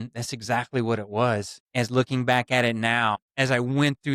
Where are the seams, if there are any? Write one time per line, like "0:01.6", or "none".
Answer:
0:01.6
0:03.2